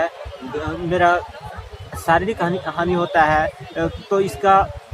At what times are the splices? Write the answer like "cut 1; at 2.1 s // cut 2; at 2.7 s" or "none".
none